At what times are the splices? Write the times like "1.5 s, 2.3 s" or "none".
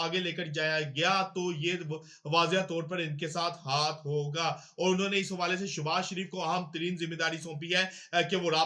none